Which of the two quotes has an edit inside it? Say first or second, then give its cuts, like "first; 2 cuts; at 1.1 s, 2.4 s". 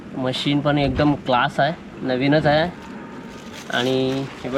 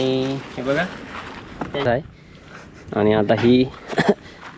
second; 1 cut; at 1.8 s